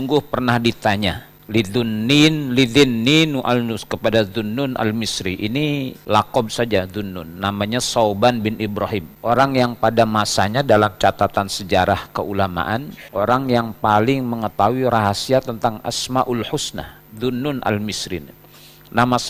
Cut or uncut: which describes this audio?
uncut